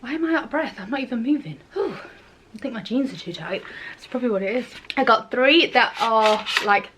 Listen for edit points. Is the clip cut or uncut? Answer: uncut